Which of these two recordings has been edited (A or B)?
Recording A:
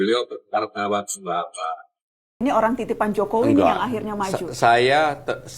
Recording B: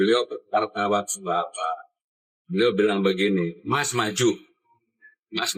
A